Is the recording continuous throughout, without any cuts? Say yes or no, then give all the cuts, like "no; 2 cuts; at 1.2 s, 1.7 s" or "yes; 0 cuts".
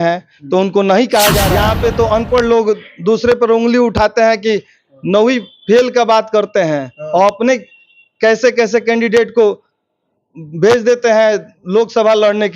no; 1 cut; at 1.6 s